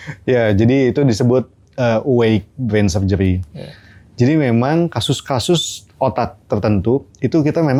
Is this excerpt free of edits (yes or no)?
yes